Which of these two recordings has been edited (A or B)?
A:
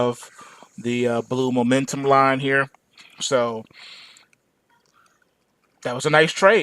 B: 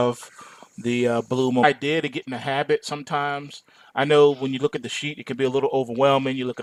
A